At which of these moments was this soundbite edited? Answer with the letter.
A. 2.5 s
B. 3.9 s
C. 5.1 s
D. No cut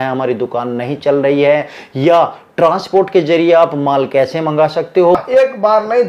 C